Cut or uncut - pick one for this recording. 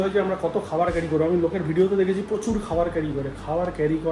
uncut